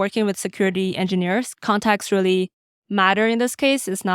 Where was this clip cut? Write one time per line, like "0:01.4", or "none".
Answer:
0:01.5

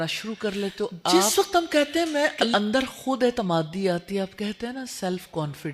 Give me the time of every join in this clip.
0:01.1
0:02.5

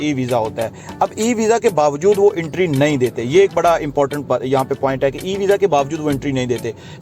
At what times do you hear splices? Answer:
none

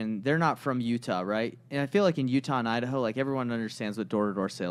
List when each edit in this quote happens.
none

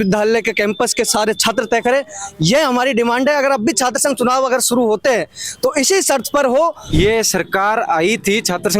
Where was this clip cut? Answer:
0:06.8

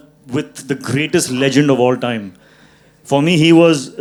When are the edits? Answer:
none

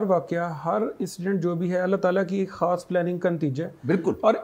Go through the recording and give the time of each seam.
none

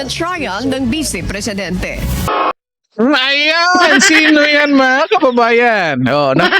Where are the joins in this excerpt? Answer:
0:02.3

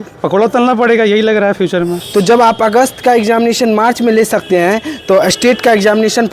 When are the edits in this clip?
0:02.0

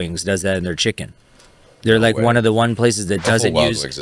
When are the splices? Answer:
none

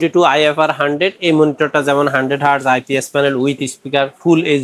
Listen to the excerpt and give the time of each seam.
none

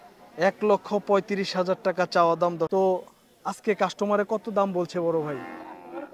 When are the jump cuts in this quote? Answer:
0:02.7

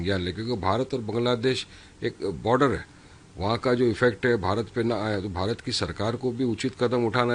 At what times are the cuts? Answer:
none

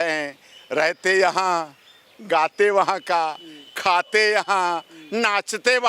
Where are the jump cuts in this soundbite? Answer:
none

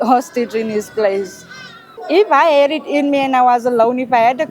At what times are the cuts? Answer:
0:01.9

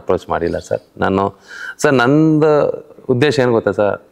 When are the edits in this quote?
none

